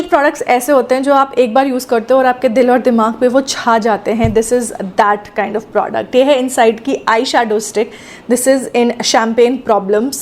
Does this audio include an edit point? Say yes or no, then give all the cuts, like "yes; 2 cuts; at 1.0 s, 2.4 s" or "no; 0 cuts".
no; 0 cuts